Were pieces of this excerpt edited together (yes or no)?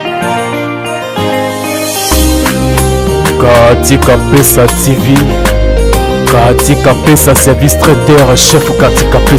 no